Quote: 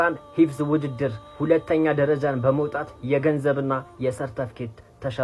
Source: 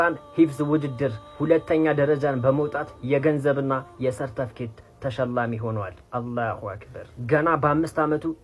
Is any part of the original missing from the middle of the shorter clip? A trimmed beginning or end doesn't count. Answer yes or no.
no